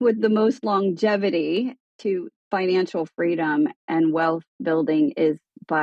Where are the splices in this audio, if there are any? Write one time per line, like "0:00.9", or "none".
0:02.1
0:03.8